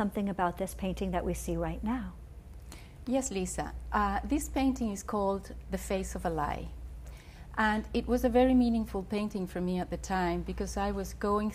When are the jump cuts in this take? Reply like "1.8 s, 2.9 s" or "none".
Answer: none

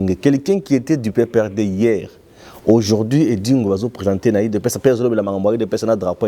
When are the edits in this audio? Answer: none

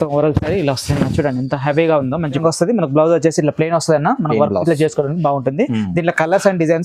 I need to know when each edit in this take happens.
2.4 s

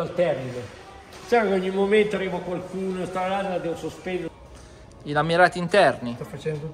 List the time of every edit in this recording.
4.3 s

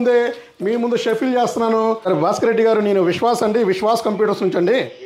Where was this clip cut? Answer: 2.1 s

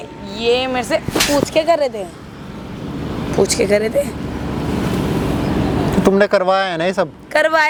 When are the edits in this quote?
none

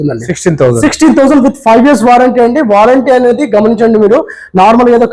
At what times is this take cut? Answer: none

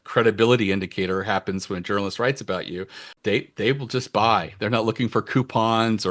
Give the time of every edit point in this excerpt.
3.1 s

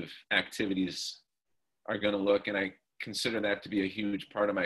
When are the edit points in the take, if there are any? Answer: none

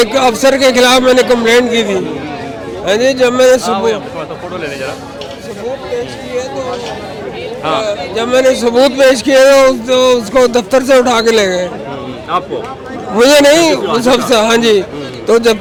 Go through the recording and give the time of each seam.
none

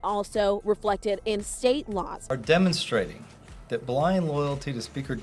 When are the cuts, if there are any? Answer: none

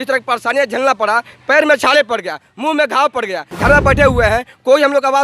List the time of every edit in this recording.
3.5 s

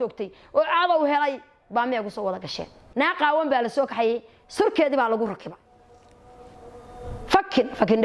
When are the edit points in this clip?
2.8 s

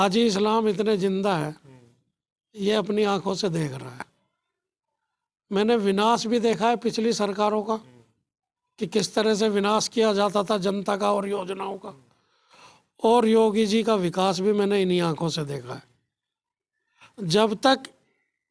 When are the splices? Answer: none

